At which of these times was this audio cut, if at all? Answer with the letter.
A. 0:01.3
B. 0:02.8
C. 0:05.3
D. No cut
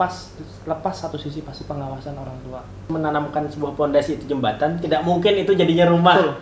B